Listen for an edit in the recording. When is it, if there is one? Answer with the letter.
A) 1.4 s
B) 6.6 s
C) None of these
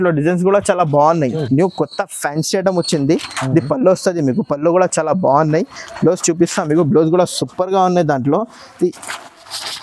A